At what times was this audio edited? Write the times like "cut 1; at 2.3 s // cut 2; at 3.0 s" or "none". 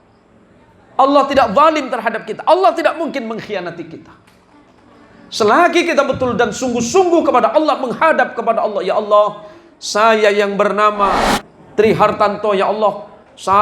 cut 1; at 11.2 s